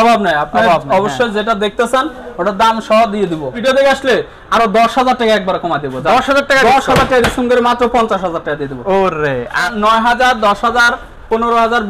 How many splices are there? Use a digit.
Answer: 2